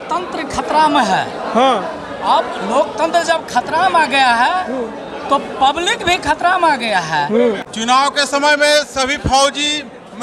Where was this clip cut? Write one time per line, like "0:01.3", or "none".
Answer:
0:07.6